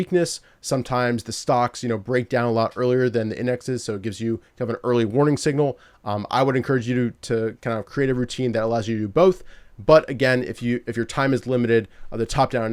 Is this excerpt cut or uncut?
uncut